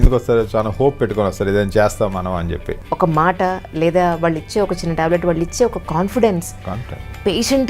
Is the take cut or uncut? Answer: cut